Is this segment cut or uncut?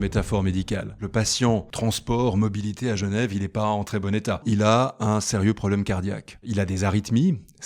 cut